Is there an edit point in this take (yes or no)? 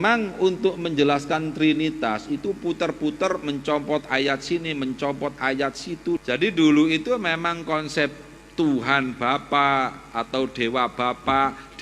yes